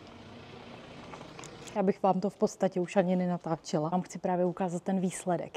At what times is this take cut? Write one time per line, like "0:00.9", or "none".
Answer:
0:01.7
0:03.9